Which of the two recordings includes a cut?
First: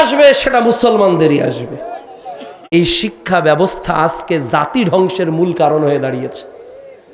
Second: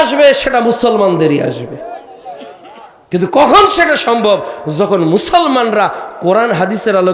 first; 1 cut; at 2.6 s

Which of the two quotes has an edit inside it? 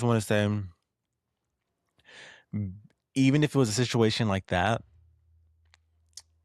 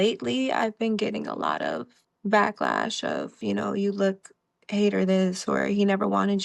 second; 2 cuts; at 1.9 s, 3.4 s

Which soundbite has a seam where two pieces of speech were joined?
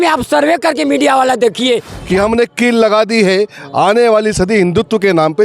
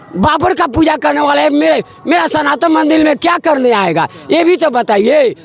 first; 1 cut; at 1.9 s

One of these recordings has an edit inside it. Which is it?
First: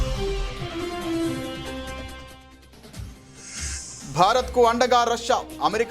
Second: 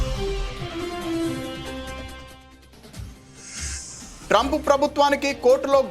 second; 1 cut; at 3.9 s

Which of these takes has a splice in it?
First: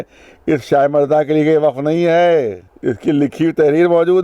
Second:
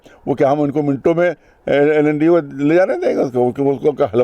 first; 1 cut; at 2.6 s

